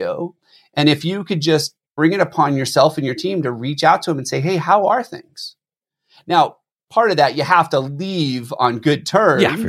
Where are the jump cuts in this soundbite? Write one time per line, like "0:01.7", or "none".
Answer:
0:01.8